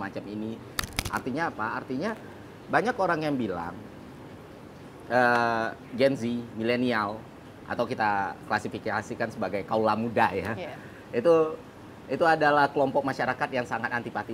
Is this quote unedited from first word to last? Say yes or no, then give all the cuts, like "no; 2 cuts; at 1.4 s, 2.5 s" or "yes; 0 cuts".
no; 1 cut; at 0.9 s